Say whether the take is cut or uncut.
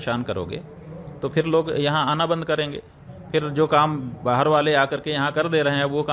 uncut